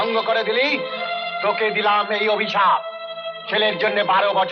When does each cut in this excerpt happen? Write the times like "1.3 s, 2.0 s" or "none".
1.0 s